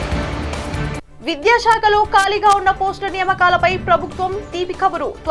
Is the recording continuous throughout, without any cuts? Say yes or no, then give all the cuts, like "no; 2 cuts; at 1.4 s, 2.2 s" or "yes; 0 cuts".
no; 1 cut; at 1.1 s